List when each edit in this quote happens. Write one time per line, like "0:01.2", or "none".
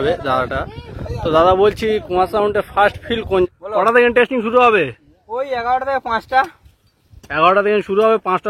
0:03.5